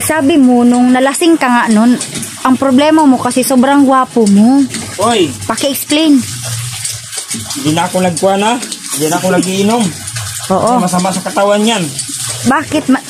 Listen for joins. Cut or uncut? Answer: uncut